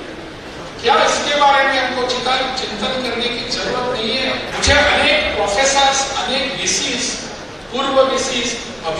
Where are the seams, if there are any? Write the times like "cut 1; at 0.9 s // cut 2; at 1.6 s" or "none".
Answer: cut 1; at 4.5 s